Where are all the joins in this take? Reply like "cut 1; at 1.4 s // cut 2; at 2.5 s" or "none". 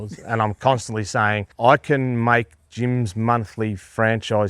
cut 1; at 1.5 s